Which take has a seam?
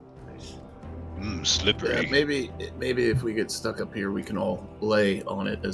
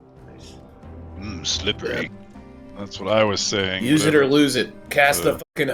second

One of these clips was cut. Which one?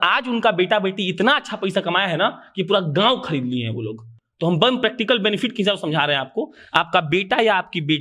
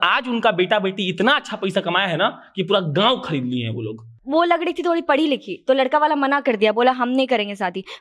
second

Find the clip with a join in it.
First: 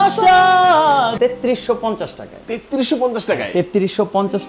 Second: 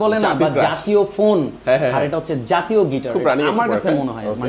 first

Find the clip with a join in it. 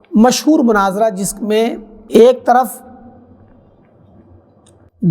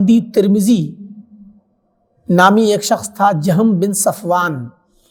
first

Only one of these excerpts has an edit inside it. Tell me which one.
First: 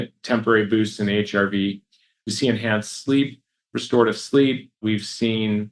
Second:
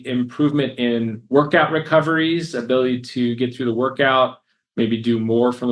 first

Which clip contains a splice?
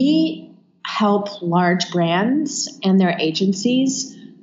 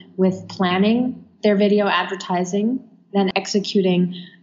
second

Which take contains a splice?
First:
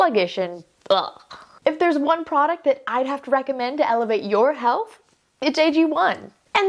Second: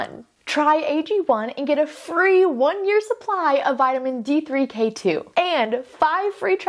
first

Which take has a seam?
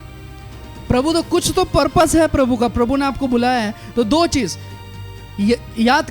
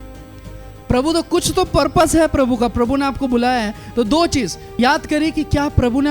second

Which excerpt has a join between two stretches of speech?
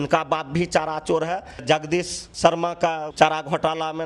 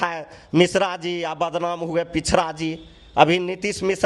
first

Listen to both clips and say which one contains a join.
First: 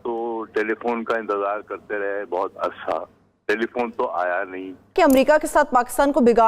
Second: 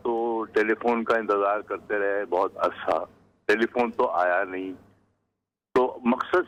first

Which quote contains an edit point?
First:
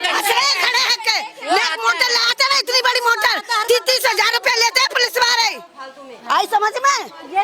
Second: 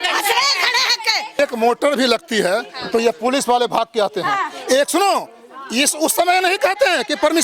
second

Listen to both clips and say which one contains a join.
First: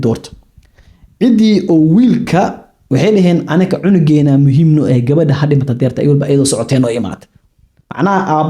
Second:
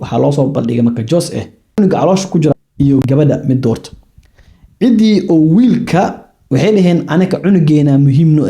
second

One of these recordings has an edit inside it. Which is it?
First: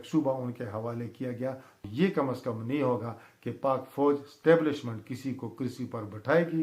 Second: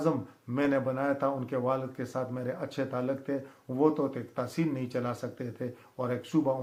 first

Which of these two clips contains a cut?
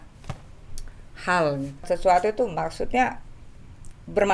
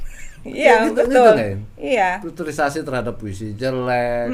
first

